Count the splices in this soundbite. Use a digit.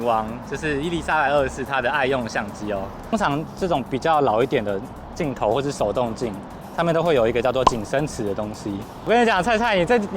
2